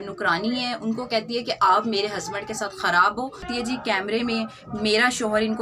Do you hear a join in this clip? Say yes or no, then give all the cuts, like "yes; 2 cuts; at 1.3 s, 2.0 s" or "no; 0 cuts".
yes; 1 cut; at 3.5 s